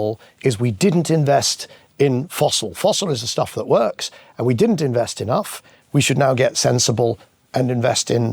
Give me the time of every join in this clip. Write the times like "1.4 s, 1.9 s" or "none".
5.7 s